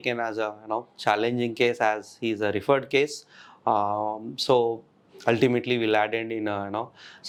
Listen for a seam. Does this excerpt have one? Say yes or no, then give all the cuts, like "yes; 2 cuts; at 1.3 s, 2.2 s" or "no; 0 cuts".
no; 0 cuts